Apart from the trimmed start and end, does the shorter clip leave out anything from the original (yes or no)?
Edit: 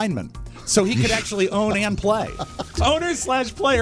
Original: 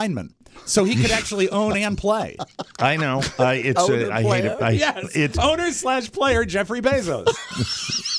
yes